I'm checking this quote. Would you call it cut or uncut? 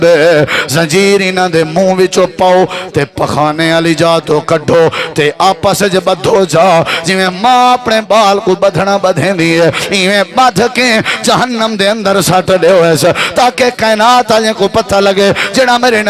uncut